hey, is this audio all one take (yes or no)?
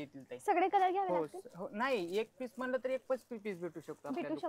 yes